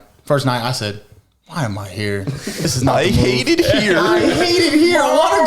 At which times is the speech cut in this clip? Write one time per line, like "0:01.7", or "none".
0:02.6